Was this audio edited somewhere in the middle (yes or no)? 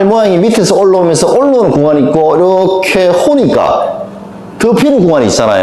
no